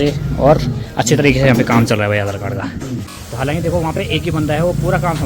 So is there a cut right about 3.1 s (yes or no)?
yes